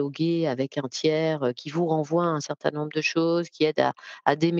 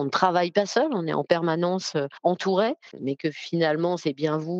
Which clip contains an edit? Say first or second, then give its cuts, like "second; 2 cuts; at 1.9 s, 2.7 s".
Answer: second; 2 cuts; at 2.1 s, 2.9 s